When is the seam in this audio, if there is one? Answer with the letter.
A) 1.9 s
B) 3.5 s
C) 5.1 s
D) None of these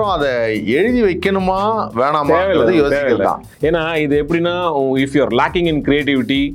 B